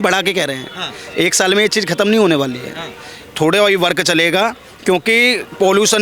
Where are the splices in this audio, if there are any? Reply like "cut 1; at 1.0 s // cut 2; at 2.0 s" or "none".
none